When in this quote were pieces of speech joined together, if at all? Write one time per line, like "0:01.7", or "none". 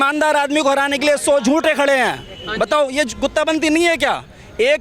none